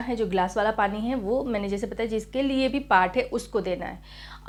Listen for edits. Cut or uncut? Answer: uncut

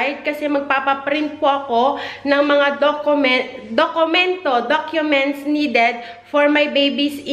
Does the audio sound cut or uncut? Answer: uncut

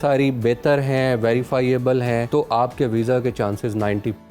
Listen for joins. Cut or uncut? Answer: cut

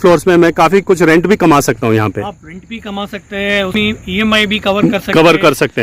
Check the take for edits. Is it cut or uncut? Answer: cut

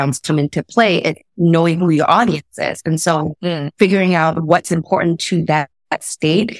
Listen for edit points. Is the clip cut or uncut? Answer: uncut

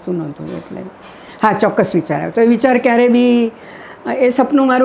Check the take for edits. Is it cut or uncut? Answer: uncut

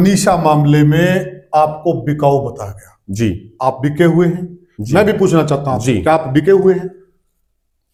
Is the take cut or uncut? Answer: uncut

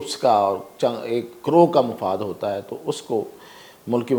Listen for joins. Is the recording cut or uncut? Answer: uncut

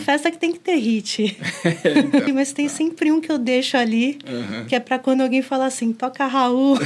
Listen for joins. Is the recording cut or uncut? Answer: cut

